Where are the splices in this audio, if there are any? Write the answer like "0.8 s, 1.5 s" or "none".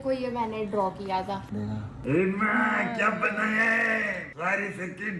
none

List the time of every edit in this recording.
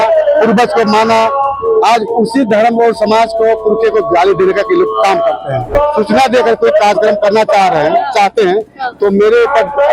5.7 s

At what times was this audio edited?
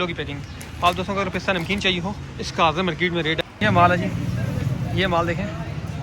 3.4 s

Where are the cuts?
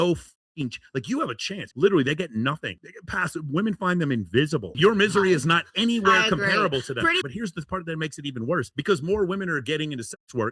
1.7 s, 4.7 s, 7.2 s

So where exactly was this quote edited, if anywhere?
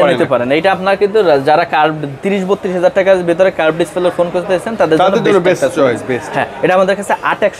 none

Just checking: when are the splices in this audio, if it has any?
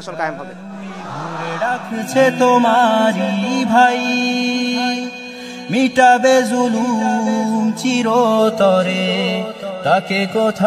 1.5 s

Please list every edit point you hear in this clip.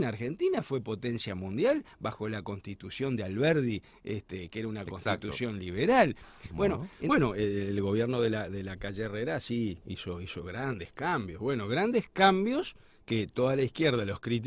6.9 s

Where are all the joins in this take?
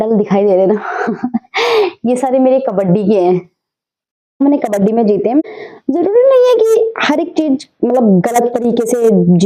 4.4 s, 5.4 s

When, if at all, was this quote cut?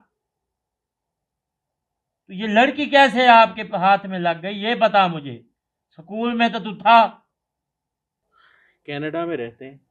8.2 s

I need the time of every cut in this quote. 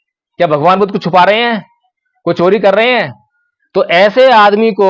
none

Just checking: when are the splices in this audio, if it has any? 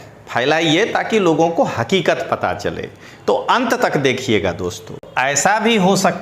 5.1 s

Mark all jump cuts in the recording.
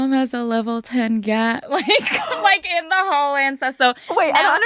none

